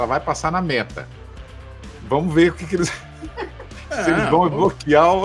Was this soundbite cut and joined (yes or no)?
no